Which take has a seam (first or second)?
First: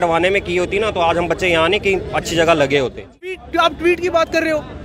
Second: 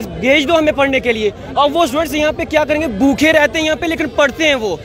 first